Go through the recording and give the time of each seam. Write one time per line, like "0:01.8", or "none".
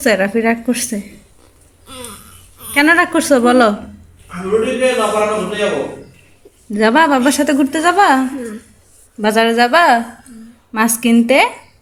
none